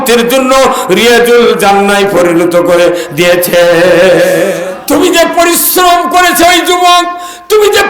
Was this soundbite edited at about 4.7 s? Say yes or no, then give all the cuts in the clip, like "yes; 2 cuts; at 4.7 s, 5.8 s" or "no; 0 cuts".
yes; 1 cut; at 4.7 s